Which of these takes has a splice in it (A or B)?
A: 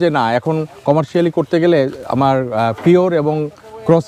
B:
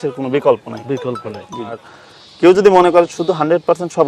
B